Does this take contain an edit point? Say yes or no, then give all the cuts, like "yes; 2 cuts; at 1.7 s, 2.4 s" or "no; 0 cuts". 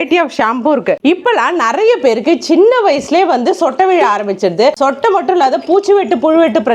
yes; 1 cut; at 1.0 s